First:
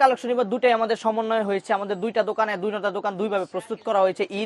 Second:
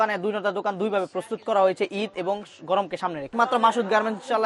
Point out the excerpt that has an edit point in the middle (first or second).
second